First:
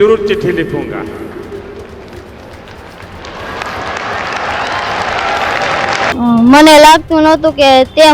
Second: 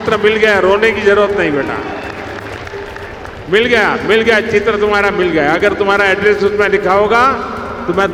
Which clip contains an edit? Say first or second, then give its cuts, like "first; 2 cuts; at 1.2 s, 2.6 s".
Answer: first; 1 cut; at 6.0 s